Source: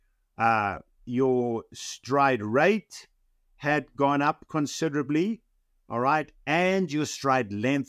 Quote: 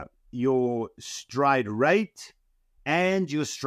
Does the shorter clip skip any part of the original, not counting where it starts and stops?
yes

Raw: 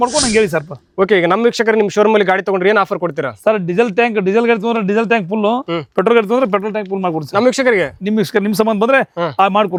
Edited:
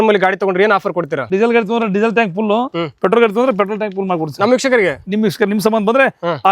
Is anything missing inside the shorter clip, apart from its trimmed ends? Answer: yes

